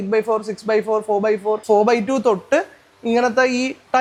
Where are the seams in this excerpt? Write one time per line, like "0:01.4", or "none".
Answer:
none